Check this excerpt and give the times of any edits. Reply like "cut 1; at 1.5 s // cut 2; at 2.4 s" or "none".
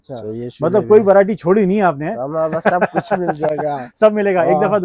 none

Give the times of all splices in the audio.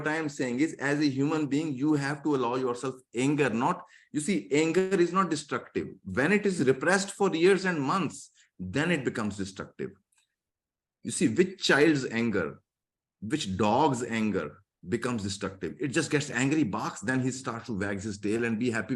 none

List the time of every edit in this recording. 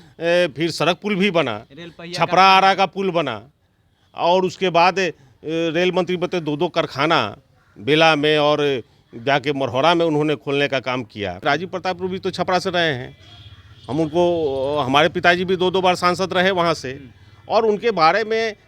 cut 1; at 11.4 s

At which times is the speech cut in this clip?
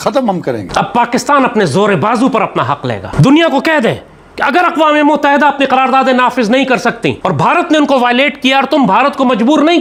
none

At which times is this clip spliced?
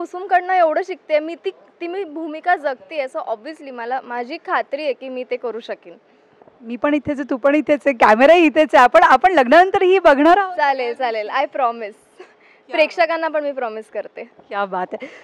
none

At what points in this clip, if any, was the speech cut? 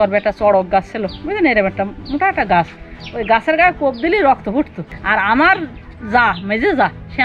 cut 1; at 4.9 s

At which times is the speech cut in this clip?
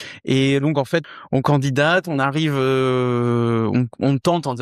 cut 1; at 1.1 s

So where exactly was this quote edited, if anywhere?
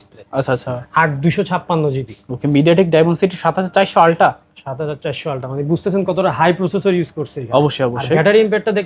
none

